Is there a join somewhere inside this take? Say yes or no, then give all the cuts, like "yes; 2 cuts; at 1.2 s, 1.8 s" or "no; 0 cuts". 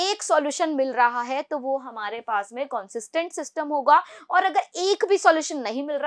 no; 0 cuts